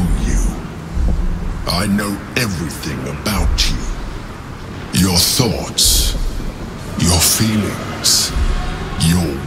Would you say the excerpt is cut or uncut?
uncut